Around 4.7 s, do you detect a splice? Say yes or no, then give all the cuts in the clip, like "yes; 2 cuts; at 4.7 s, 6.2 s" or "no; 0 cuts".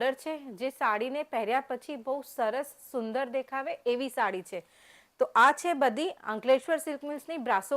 no; 0 cuts